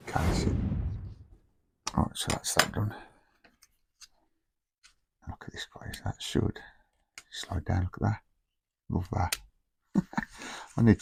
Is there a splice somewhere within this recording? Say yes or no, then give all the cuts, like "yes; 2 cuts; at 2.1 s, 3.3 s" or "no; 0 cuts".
no; 0 cuts